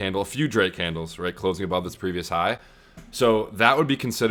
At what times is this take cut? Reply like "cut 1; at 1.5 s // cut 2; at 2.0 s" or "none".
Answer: none

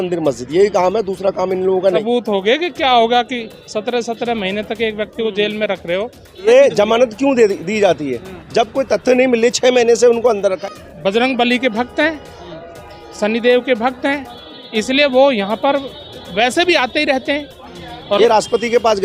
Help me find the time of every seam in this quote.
cut 1; at 2.0 s // cut 2; at 6.5 s // cut 3; at 10.6 s // cut 4; at 18.0 s

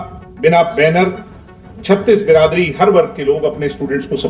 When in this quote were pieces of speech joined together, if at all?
none

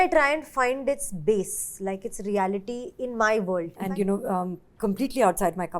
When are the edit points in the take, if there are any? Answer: cut 1; at 3.8 s

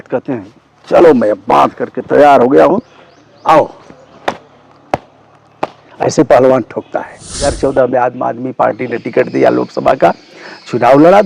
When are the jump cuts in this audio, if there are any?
cut 1; at 7.6 s

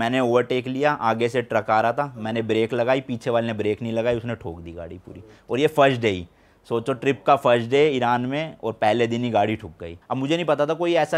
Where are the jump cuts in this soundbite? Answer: cut 1; at 10.0 s

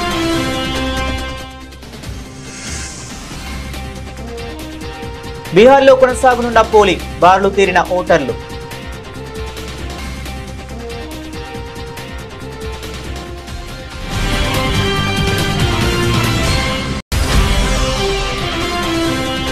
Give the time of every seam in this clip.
none

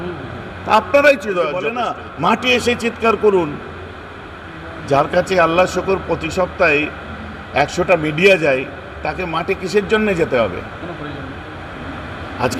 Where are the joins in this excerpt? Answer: cut 1; at 1.8 s

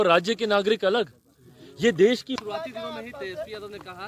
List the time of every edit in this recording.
cut 1; at 2.3 s

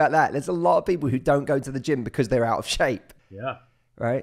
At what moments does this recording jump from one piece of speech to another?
cut 1; at 3.1 s

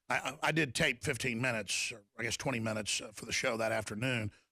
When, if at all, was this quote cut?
none

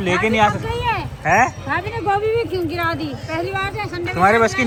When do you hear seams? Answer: none

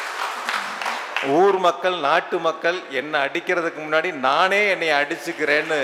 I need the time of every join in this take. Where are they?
none

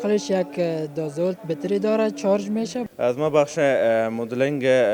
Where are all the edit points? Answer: cut 1; at 2.8 s

